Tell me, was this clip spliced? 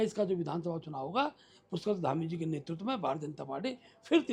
no; 0 cuts

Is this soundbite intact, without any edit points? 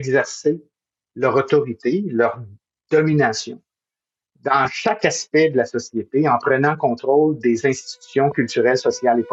yes; 0 cuts

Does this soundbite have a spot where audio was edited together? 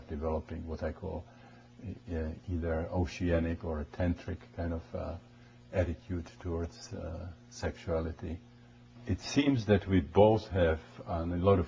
yes; 1 cut; at 10.5 s

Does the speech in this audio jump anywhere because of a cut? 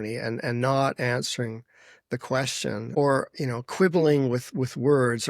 yes; 1 cut; at 3.0 s

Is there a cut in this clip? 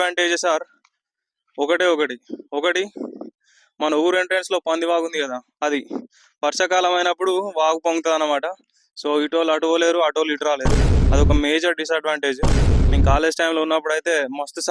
no; 0 cuts

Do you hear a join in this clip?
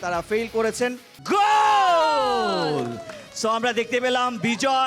yes; 1 cut; at 1.1 s

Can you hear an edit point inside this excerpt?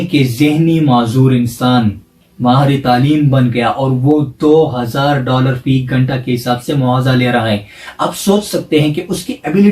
no; 0 cuts

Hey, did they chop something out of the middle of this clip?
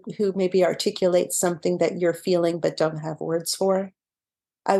no; 0 cuts

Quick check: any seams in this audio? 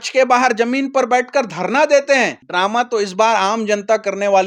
yes; 1 cut; at 2.4 s

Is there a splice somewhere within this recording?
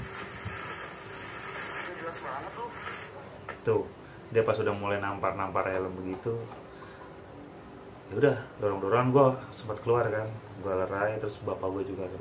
no; 0 cuts

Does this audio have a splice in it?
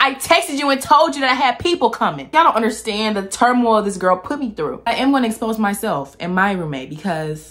yes; 2 cuts; at 2.3 s, 4.8 s

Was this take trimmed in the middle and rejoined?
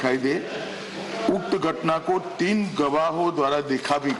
no; 0 cuts

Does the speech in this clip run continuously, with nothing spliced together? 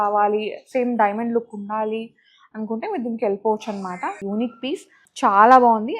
no; 1 cut; at 4.2 s

